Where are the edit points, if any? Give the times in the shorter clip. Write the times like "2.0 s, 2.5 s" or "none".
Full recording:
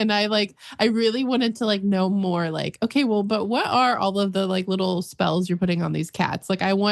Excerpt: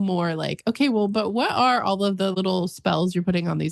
2.3 s